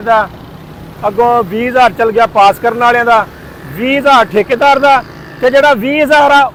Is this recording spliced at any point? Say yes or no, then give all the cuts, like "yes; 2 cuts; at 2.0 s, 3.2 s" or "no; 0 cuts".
no; 0 cuts